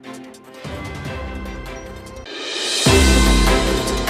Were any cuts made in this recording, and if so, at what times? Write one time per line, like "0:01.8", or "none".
none